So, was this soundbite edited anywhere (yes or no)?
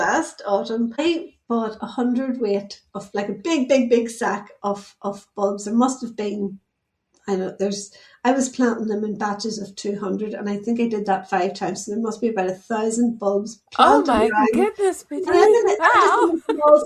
yes